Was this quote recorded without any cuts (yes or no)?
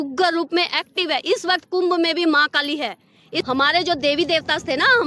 no